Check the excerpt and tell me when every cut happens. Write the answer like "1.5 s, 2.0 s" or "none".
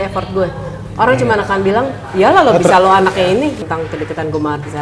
3.6 s